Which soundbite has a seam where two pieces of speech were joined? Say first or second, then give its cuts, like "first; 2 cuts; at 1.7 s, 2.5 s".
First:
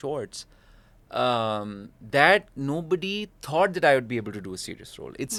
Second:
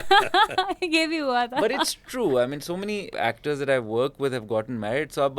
second; 1 cut; at 3.1 s